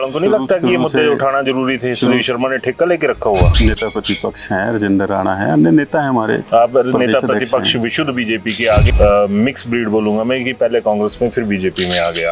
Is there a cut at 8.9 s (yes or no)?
yes